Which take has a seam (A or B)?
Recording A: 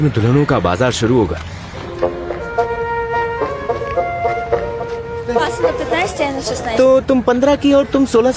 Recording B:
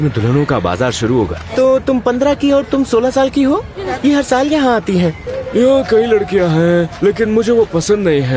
B